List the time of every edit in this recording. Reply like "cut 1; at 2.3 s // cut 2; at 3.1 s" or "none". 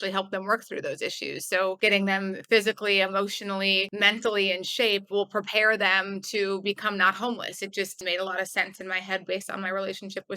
cut 1; at 1.8 s // cut 2; at 3.9 s // cut 3; at 8.0 s